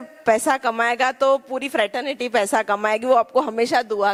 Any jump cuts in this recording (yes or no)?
no